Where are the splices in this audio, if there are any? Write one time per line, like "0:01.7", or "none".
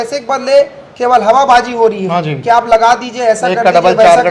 none